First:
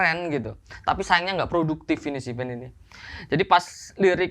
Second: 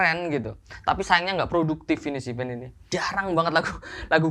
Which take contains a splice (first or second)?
second